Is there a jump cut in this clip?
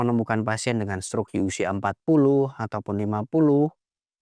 no; 0 cuts

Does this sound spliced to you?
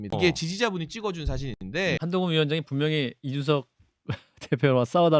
yes; 1 cut; at 2.0 s

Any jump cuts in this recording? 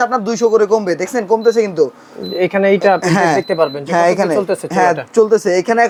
no; 0 cuts

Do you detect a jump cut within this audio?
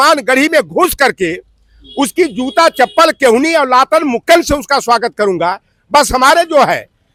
no; 0 cuts

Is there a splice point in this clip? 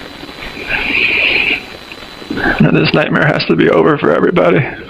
no; 0 cuts

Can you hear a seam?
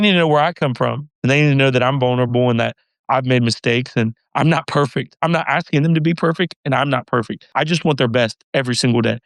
yes; 1 cut; at 7.4 s

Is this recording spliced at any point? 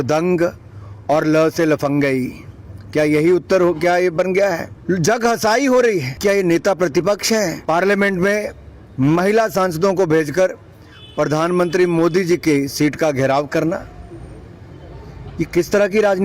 yes; 3 cuts; at 4.7 s, 6.2 s, 7.6 s

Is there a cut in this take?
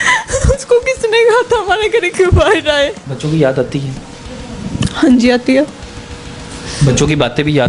yes; 1 cut; at 3.1 s

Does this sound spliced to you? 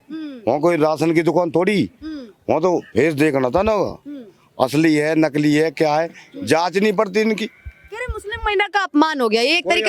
no; 0 cuts

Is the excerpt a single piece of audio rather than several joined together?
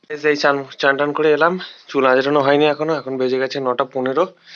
yes; 0 cuts

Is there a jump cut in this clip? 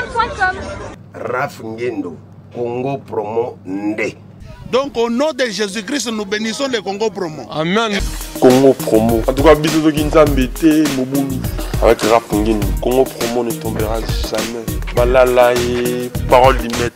no; 0 cuts

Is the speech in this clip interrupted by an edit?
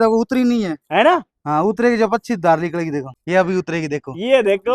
yes; 1 cut; at 3.2 s

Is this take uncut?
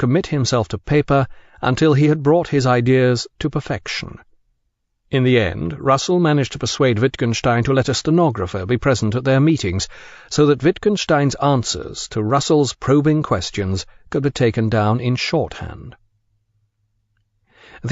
no; 1 cut; at 1.8 s

